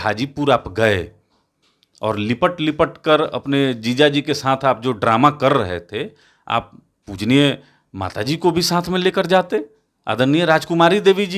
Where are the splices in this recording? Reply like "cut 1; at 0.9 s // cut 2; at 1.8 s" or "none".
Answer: none